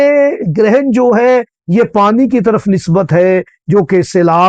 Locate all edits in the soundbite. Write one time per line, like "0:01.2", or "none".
none